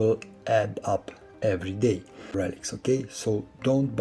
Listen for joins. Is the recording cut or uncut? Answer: cut